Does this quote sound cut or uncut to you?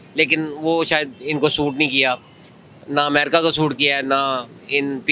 uncut